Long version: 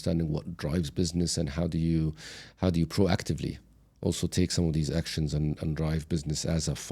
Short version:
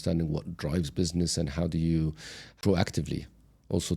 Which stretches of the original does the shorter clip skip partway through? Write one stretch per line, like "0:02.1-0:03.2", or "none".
0:02.6-0:02.9